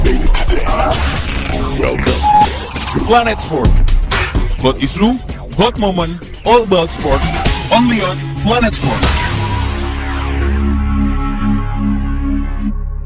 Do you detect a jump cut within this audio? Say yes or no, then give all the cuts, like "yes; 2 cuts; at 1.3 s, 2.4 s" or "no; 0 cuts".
no; 0 cuts